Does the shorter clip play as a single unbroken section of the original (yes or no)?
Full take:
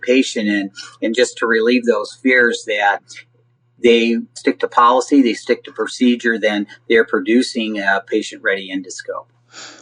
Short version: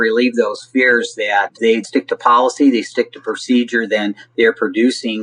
no